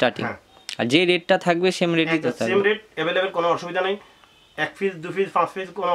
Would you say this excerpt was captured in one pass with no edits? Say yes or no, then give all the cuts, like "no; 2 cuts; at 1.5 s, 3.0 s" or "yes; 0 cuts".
yes; 0 cuts